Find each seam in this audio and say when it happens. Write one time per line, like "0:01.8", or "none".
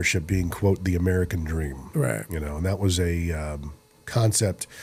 none